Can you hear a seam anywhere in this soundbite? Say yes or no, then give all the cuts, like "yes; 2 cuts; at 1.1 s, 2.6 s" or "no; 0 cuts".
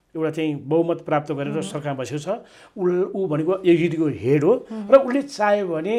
no; 0 cuts